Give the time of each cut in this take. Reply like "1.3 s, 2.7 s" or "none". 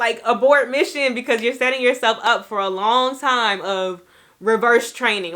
none